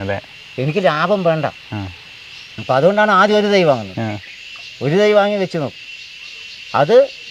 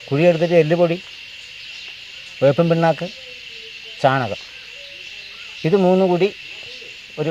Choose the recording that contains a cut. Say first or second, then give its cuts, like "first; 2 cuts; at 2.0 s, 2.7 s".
first; 1 cut; at 2.5 s